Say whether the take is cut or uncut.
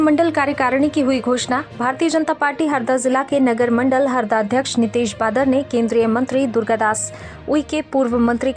uncut